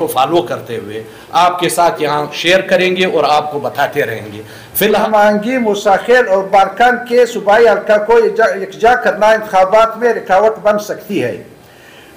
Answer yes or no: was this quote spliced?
yes